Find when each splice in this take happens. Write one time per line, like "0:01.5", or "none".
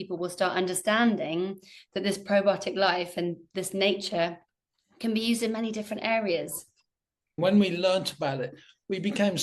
0:07.4